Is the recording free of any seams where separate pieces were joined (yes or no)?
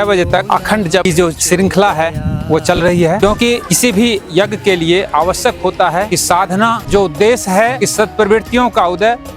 no